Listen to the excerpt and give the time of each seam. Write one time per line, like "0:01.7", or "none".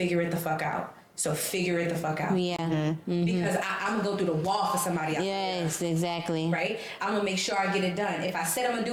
none